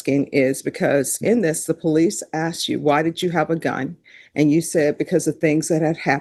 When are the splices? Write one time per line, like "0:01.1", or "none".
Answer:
none